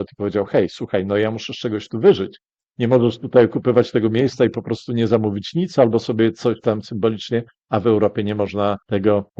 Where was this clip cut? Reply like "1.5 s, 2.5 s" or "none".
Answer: none